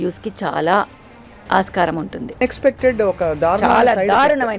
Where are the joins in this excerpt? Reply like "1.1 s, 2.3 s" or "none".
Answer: 2.4 s

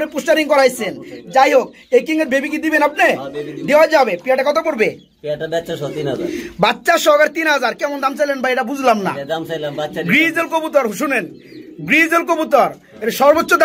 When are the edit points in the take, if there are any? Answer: none

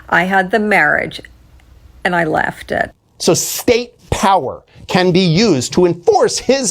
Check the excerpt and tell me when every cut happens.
3.0 s

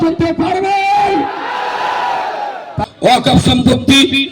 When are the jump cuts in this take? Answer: 2.8 s

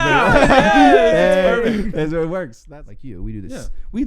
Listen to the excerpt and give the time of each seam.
2.6 s

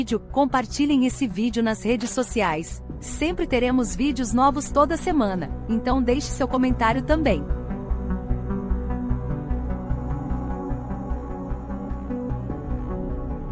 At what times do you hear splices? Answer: none

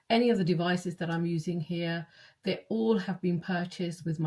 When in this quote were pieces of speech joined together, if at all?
none

